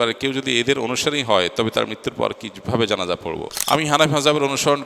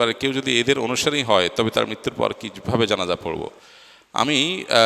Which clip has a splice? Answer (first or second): first